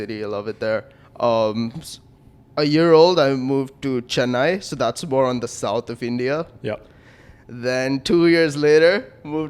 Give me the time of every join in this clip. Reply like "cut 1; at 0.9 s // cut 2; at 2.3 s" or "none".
none